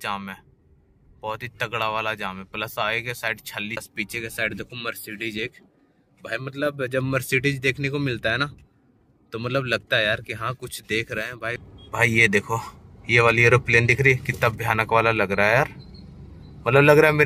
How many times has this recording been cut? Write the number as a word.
two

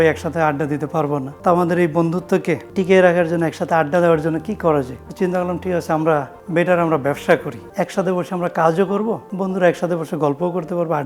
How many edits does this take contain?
six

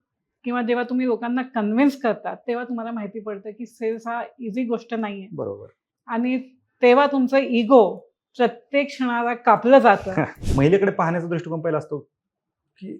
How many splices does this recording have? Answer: one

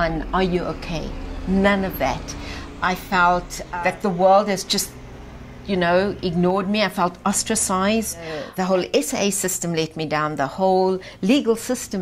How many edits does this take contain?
two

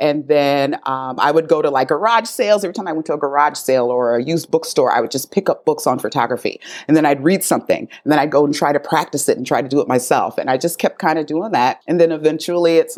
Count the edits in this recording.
one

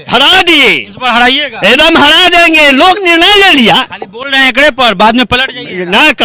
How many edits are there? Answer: zero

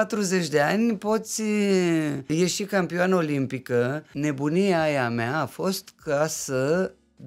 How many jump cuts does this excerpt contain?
two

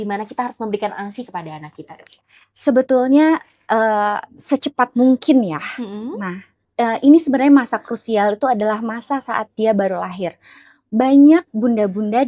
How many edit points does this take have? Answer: zero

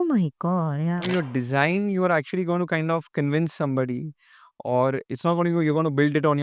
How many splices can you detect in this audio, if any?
one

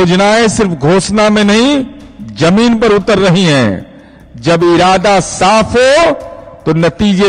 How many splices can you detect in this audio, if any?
zero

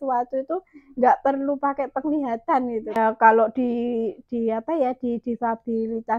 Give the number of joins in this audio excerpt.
one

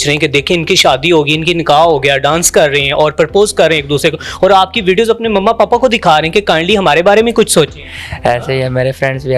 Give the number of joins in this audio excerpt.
zero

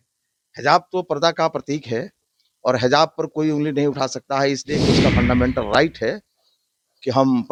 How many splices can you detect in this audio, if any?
zero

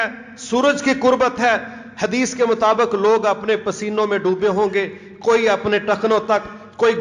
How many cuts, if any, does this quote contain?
zero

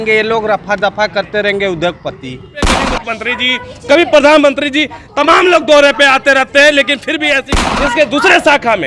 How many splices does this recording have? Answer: two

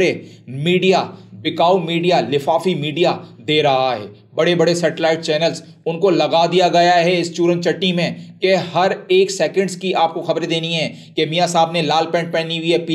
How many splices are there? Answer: zero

